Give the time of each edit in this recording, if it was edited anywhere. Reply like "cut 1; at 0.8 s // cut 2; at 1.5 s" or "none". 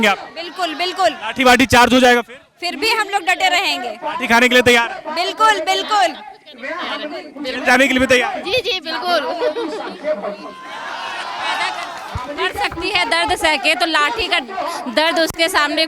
none